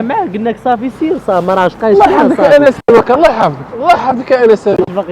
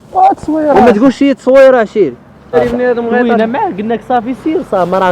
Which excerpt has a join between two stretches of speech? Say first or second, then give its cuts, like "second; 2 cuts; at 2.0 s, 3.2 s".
second; 1 cut; at 2.5 s